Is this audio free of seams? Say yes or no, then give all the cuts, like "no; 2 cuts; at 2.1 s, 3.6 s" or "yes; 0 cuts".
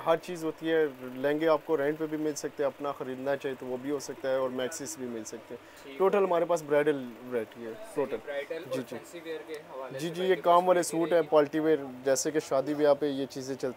yes; 0 cuts